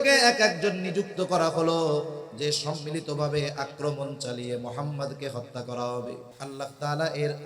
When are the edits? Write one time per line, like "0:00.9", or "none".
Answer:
0:06.3